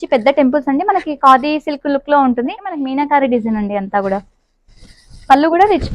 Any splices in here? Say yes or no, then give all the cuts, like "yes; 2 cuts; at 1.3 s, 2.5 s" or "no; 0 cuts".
yes; 1 cut; at 2.7 s